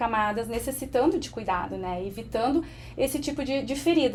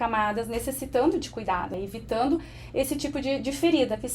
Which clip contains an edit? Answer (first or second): second